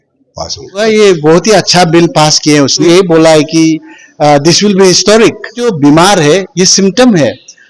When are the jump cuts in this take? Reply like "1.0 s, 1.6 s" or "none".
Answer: 0.8 s, 2.9 s, 5.6 s